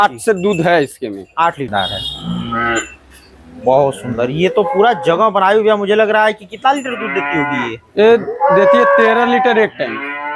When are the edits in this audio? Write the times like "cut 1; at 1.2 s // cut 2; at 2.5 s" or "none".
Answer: cut 1; at 1.7 s